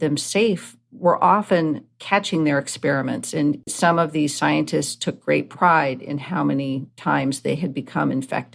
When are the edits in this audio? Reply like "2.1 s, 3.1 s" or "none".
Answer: 3.7 s